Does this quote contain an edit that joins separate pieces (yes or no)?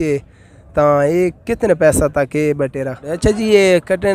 yes